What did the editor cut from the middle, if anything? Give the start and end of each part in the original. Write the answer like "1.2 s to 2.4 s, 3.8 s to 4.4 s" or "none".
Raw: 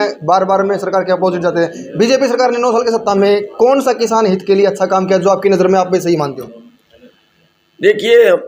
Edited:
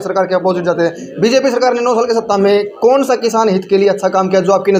none